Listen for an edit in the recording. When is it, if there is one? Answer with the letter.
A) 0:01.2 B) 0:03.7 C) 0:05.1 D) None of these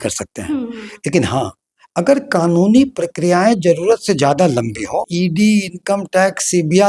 C